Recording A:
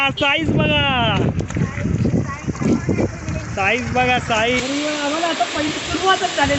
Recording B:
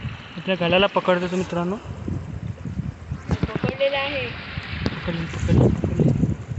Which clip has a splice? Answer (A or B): A